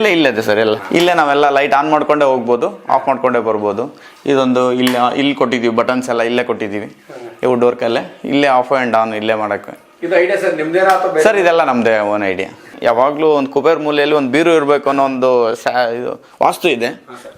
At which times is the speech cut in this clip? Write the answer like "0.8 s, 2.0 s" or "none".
0.8 s, 12.7 s